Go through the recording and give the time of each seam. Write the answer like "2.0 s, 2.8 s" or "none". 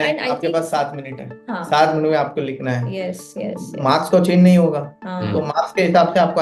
none